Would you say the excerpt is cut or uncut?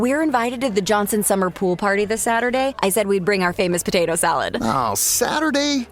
uncut